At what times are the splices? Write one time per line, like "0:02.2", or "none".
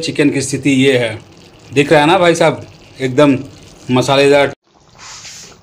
0:04.5